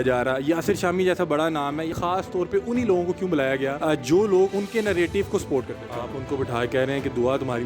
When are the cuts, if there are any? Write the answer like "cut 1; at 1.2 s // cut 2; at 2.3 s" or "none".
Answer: cut 1; at 1.9 s // cut 2; at 3.8 s // cut 3; at 4.5 s // cut 4; at 5.8 s